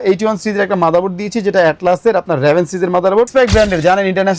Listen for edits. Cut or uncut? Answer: cut